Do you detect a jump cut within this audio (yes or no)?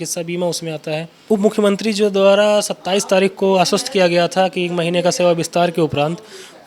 yes